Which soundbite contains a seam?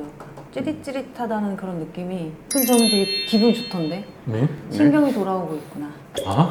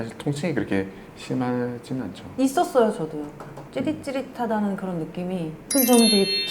second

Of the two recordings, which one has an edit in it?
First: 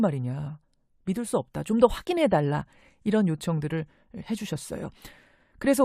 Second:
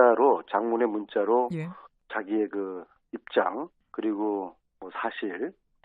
first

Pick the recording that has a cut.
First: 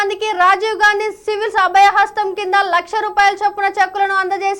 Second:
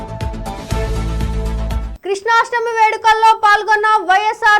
second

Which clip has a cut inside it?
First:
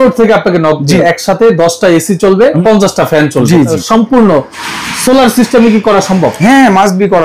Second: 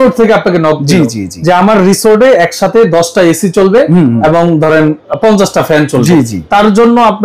first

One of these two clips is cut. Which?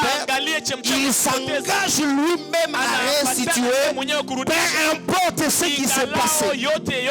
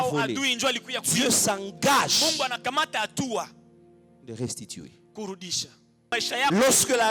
second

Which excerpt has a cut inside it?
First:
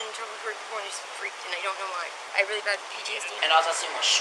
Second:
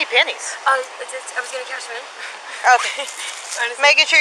first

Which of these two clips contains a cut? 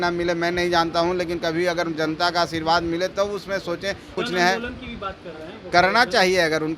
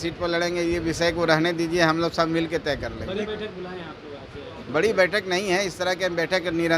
first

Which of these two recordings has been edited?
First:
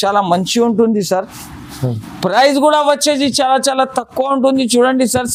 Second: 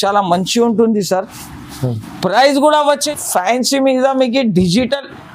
second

